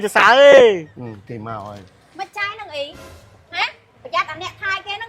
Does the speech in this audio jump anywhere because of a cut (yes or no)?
yes